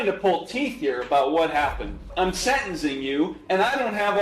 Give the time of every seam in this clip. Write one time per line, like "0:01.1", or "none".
0:02.0